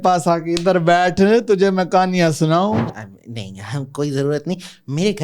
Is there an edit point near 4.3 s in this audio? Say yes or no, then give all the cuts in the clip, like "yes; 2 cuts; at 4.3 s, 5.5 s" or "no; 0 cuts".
no; 1 cut; at 2.9 s